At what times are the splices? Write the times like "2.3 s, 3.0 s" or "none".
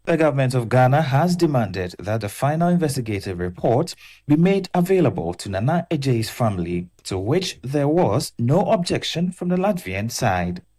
none